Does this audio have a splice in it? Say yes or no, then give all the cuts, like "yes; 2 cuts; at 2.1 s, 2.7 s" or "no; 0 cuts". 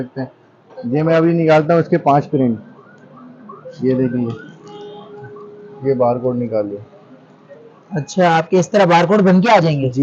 no; 0 cuts